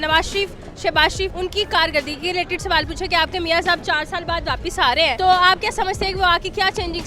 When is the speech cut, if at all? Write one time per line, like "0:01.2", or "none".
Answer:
0:01.3
0:05.1